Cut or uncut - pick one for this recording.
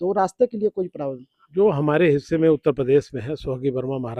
uncut